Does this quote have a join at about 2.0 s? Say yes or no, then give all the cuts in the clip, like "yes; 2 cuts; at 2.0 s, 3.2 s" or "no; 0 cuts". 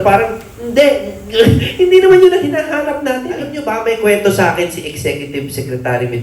no; 1 cut; at 3.6 s